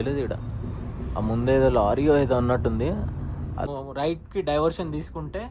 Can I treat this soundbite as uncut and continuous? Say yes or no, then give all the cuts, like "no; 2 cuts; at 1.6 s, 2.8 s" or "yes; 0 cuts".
no; 1 cut; at 3.7 s